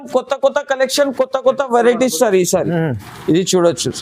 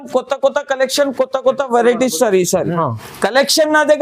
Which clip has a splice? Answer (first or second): second